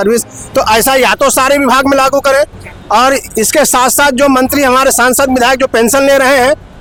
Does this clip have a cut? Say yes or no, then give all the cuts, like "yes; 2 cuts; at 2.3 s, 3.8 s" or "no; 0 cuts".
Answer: no; 0 cuts